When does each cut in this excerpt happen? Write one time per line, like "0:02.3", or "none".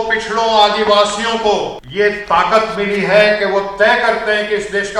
0:01.8

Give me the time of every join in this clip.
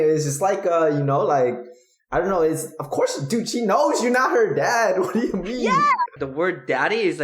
0:06.2

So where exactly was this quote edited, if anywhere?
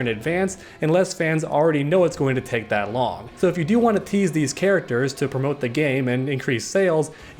0:03.2

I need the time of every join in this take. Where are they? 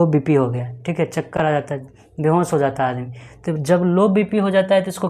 none

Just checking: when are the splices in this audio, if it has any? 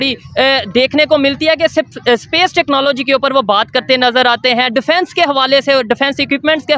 none

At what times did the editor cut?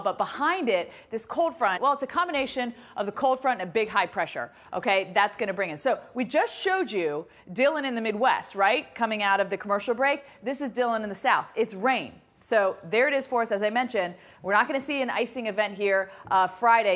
0:11.2

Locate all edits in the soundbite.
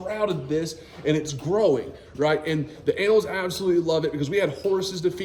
none

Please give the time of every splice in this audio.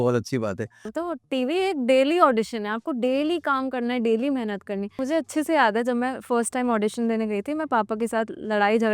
0:00.9
0:04.9

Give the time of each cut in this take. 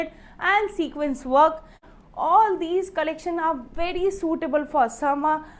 0:01.9

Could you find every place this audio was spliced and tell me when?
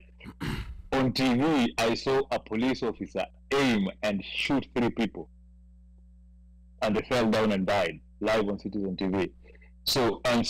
none

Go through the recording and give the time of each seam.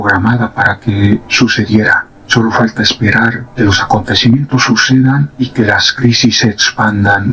none

